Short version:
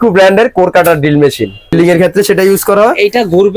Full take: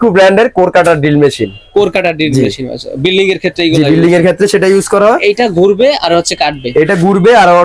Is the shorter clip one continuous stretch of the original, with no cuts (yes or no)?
no